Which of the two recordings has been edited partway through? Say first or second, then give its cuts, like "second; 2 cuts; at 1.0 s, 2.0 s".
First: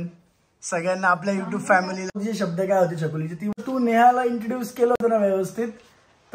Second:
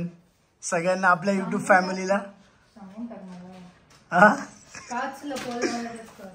first; 2 cuts; at 2.1 s, 3.6 s